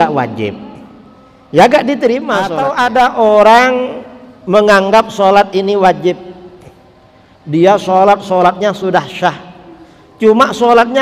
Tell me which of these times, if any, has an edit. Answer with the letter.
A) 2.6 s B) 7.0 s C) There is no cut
A